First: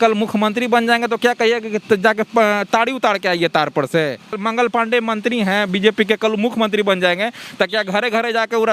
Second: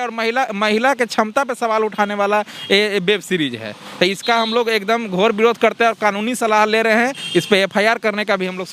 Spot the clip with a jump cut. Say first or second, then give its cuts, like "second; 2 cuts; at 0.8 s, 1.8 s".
first; 1 cut; at 4.4 s